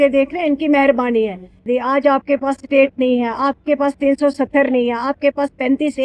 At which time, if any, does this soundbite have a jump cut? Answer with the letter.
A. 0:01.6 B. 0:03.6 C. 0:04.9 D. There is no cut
A